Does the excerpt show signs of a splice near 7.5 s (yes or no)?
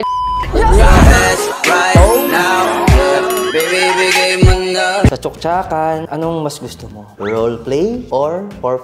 no